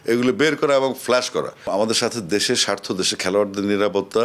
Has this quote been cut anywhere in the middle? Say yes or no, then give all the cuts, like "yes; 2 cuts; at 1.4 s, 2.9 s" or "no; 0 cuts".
yes; 1 cut; at 1.7 s